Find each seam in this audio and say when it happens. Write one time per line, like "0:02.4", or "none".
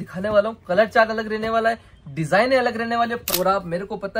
0:03.2